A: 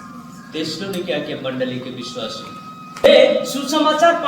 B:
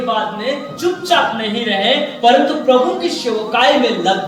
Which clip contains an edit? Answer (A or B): A